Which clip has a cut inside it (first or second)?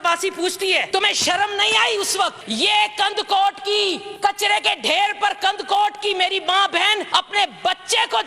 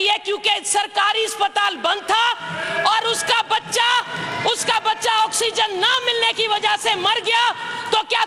first